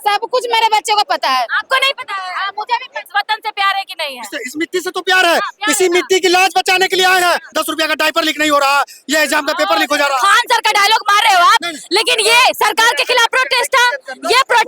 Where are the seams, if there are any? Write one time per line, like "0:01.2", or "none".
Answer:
0:03.1
0:07.5

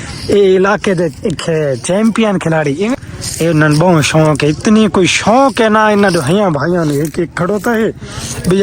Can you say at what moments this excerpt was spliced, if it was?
0:03.0

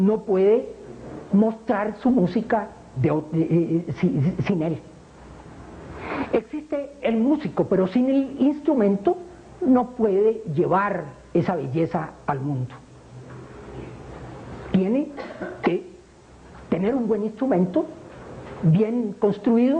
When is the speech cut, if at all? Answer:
0:01.4

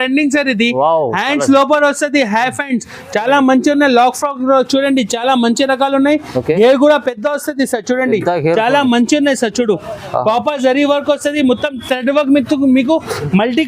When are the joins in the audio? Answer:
none

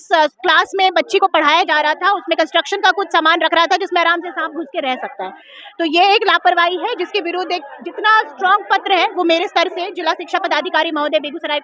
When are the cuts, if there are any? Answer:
none

